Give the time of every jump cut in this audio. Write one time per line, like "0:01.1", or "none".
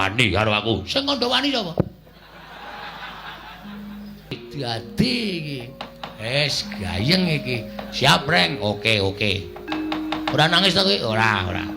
0:04.4